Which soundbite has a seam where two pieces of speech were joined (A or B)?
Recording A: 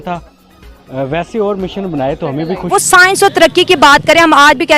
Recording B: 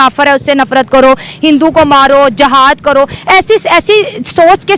A